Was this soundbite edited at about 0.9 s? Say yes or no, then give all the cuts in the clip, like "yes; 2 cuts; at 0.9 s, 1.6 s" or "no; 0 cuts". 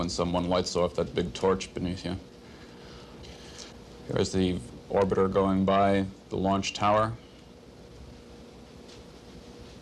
yes; 1 cut; at 0.9 s